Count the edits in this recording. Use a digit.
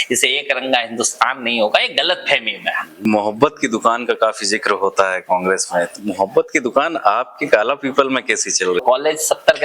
2